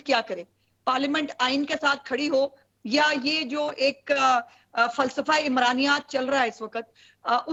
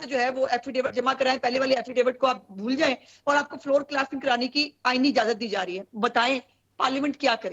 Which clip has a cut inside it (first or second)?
second